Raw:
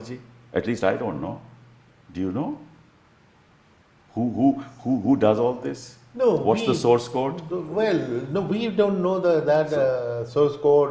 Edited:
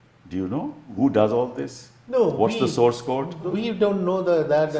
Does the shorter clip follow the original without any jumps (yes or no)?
no